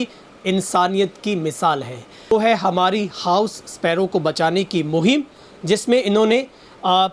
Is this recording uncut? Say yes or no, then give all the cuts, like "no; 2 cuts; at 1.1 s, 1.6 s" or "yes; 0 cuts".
no; 1 cut; at 2.3 s